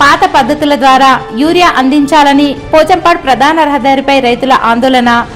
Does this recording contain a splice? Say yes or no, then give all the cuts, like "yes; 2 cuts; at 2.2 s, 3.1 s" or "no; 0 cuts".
no; 0 cuts